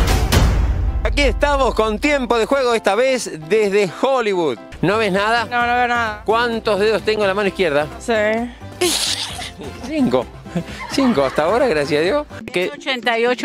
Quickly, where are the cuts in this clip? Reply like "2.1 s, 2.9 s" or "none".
1.1 s, 4.7 s, 12.4 s